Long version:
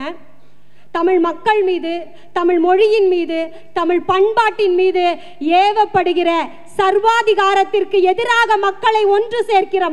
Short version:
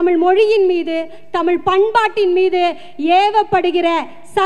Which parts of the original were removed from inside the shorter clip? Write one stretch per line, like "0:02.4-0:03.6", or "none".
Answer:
none